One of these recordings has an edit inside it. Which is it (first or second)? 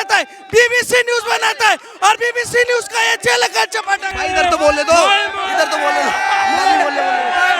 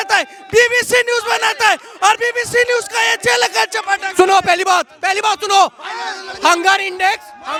first